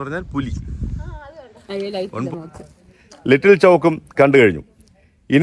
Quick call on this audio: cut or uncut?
cut